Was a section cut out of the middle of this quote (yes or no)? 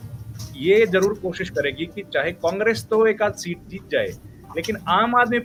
no